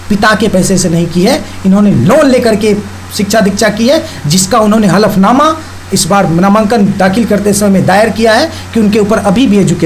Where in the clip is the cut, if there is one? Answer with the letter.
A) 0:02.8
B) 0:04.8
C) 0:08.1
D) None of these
D